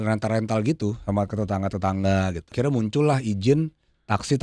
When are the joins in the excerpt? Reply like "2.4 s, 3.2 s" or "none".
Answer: 2.5 s

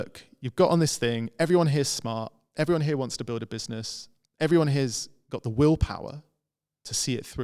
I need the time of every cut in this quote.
none

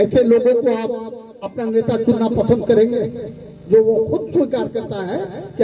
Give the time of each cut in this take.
none

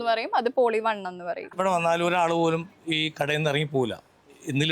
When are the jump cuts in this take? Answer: 1.5 s

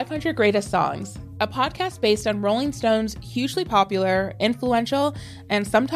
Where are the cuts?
none

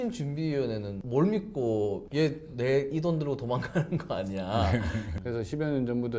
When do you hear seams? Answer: 2.0 s, 5.1 s

